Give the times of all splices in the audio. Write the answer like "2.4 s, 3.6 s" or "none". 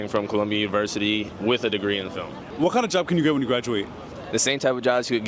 none